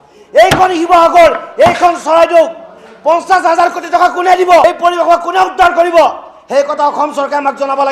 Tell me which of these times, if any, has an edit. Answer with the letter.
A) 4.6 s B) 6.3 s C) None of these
C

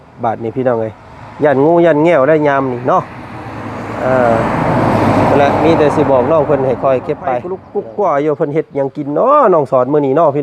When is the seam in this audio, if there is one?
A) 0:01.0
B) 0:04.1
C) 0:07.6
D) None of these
C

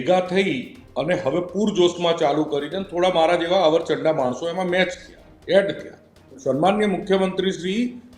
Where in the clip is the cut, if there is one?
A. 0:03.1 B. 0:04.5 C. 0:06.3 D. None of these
C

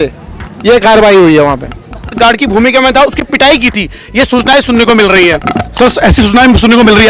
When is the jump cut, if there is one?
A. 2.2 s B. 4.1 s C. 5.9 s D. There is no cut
A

